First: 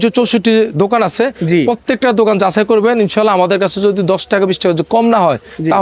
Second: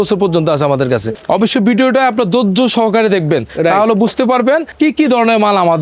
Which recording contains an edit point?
second; 2 cuts; at 1.1 s, 4.7 s

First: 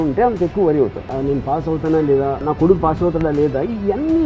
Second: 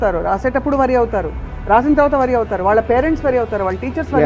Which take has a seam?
first; 2 cuts; at 1.1 s, 2.5 s

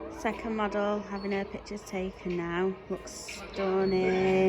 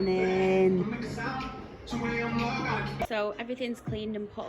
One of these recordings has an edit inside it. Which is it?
second; 1 cut; at 3.0 s

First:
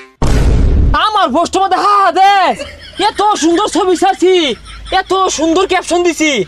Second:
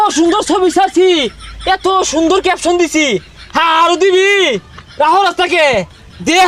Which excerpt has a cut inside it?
first; 1 cut; at 0.9 s

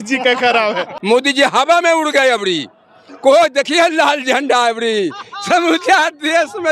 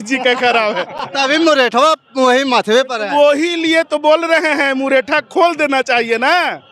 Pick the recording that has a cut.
first; 1 cut; at 0.9 s

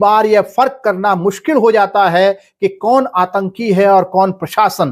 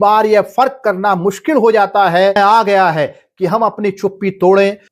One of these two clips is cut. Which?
second; 1 cut; at 2.4 s

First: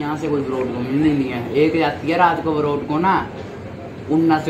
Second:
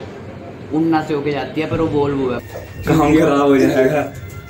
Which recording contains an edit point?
second; 1 cut; at 2.4 s

